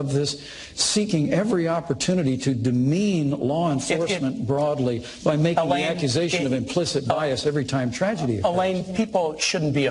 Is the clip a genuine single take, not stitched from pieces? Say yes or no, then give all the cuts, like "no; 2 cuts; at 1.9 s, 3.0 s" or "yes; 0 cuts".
yes; 0 cuts